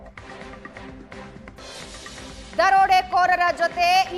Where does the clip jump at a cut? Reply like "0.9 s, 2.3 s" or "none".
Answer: 1.3 s